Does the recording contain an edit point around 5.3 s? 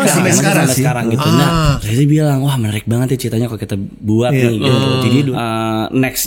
yes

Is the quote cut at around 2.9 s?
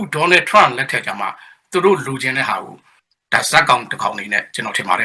yes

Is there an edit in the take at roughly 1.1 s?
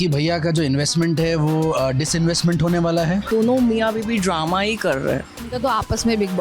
no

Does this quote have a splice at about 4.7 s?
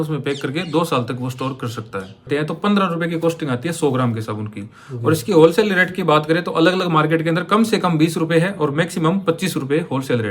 no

